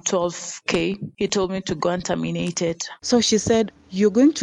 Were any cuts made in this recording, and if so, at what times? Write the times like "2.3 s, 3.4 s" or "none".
2.9 s